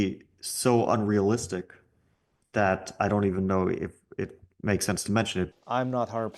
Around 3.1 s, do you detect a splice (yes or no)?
no